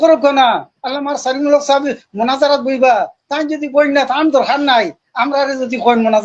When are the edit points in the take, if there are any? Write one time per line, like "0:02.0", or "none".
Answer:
none